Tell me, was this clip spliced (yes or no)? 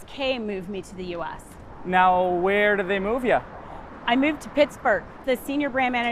yes